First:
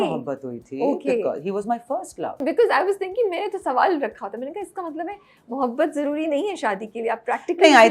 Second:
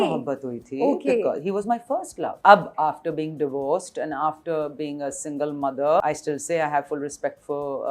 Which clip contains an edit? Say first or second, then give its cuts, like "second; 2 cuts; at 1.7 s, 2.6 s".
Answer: second; 2 cuts; at 2.4 s, 6.0 s